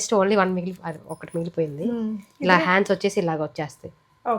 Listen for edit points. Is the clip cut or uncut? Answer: uncut